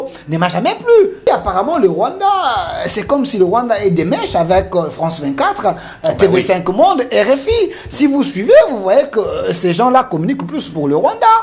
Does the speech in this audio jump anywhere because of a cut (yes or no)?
yes